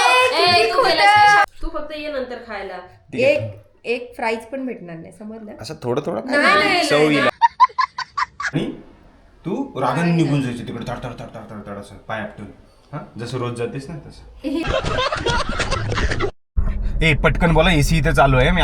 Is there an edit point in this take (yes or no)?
yes